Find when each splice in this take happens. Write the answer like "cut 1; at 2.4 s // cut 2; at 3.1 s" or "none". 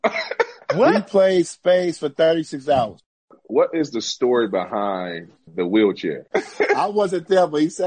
cut 1; at 3.4 s // cut 2; at 6.2 s